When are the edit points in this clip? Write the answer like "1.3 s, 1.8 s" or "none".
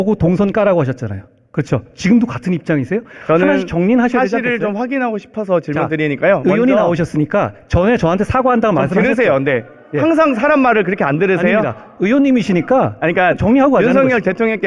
none